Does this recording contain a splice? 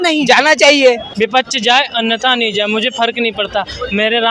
yes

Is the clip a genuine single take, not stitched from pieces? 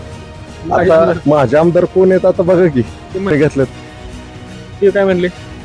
no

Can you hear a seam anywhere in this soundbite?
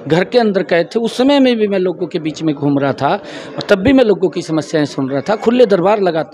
no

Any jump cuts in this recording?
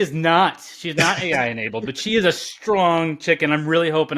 no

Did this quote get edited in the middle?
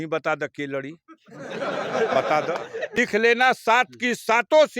yes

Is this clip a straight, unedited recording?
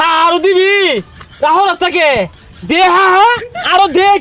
yes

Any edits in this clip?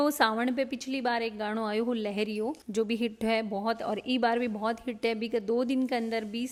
no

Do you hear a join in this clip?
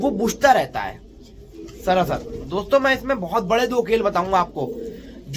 no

